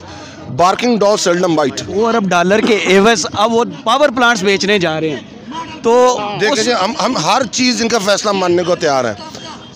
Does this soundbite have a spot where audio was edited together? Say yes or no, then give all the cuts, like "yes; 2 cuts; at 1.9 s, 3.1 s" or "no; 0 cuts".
no; 0 cuts